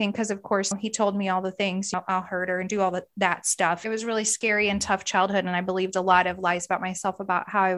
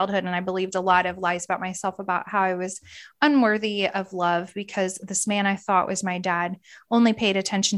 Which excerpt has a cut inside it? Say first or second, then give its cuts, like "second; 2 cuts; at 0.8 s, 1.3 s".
first; 3 cuts; at 0.7 s, 1.9 s, 3.8 s